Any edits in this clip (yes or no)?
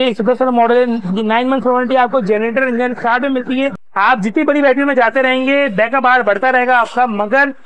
yes